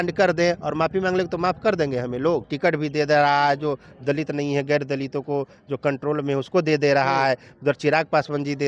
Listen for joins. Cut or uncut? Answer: cut